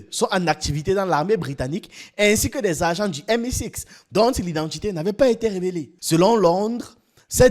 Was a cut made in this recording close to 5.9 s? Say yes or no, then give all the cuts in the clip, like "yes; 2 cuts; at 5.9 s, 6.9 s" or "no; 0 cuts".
yes; 1 cut; at 5.9 s